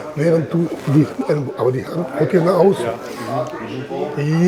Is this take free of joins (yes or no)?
yes